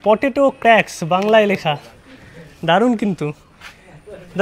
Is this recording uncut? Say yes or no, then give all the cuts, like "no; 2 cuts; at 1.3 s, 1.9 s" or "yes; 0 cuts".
yes; 0 cuts